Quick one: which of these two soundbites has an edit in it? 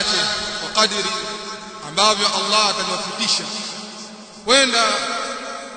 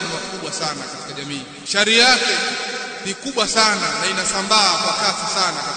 second; 2 cuts; at 1.6 s, 2.9 s

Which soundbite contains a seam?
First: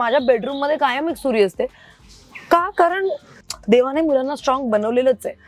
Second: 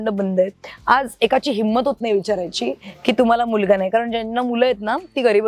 first; 1 cut; at 3.3 s

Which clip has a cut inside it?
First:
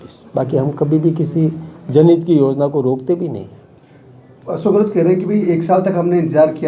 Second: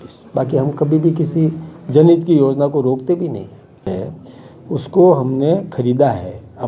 second; 1 cut; at 3.9 s

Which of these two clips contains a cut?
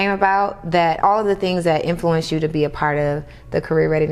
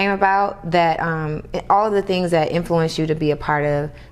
first; 1 cut; at 1.0 s

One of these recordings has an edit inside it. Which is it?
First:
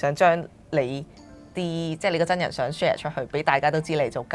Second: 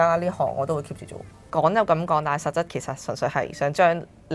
second; 1 cut; at 1.4 s

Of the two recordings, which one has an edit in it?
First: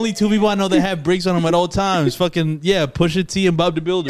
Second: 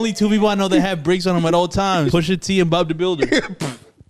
second; 1 cut; at 2.1 s

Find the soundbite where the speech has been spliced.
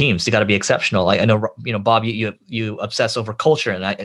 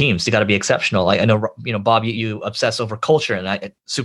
second; 1 cut; at 2.1 s

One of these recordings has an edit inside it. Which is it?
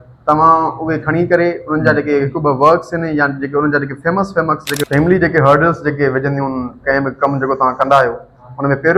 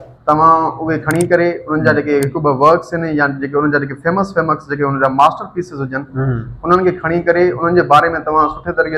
first; 1 cut; at 4.8 s

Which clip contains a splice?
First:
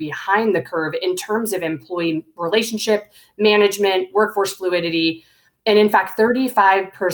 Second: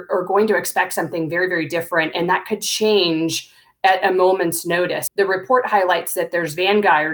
second; 1 cut; at 5.0 s

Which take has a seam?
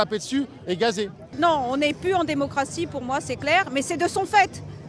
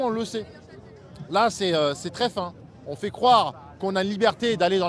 first; 1 cut; at 1.3 s

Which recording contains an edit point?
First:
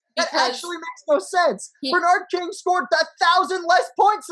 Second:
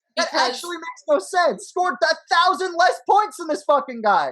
second; 1 cut; at 1.6 s

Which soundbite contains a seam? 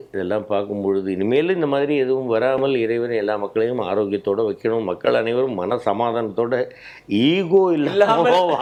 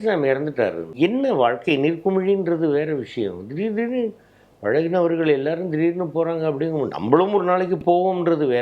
second; 1 cut; at 0.9 s

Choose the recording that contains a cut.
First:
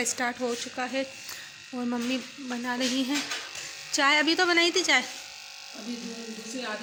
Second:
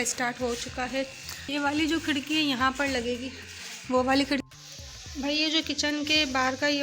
second; 2 cuts; at 1.5 s, 4.4 s

